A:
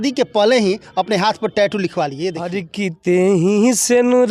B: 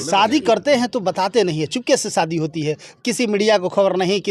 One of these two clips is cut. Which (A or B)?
A